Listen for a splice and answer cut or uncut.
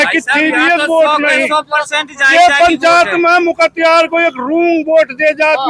uncut